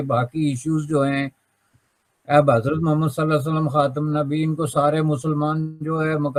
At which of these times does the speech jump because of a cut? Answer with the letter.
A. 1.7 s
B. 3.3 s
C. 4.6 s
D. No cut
D